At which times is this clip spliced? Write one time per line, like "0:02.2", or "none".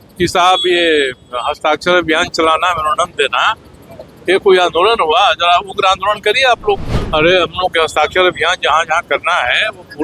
0:06.9

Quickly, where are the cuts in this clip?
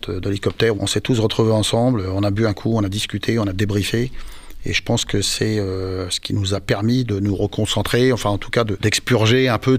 0:00.8
0:08.8

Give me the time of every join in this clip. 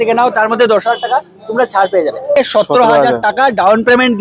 0:02.4

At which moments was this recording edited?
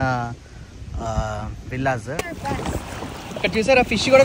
0:02.3

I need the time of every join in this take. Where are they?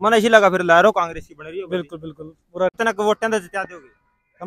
0:02.7

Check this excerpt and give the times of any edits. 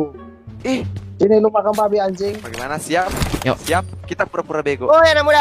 0:02.3

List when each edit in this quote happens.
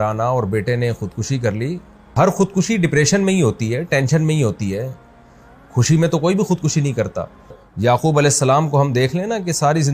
0:02.1
0:07.6

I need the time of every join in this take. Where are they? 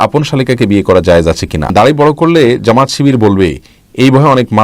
0:01.7

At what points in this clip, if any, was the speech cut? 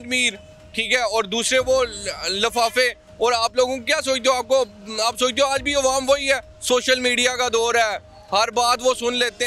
none

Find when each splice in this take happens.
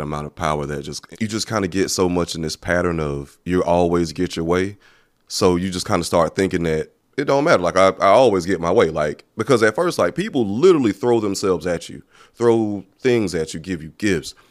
0:01.0
0:07.0

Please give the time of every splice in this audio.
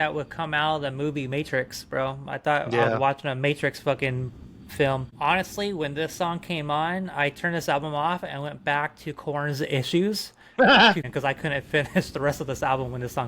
0:05.1
0:11.1

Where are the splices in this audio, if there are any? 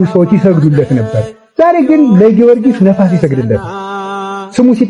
none

